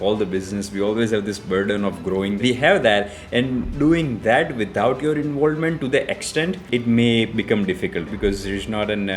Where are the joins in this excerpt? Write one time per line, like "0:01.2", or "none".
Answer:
0:02.4
0:06.7
0:08.1

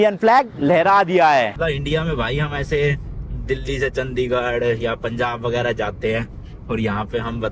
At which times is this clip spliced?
0:01.5

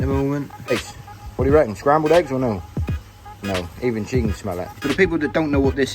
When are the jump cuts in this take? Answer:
0:00.7
0:04.7

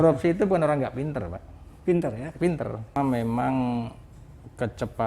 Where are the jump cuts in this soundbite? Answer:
0:03.0

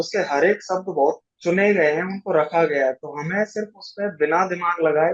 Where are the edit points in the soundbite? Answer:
none

